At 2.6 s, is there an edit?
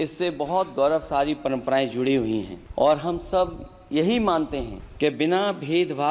yes; 2 cuts; at 2.6 s, 4.8 s

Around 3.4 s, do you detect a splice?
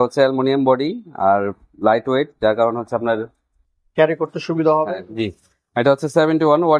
no; 1 cut; at 5.0 s

